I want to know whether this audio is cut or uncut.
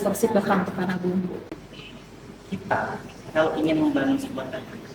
cut